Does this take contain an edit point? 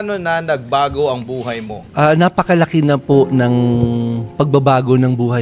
yes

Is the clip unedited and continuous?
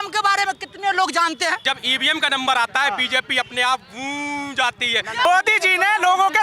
no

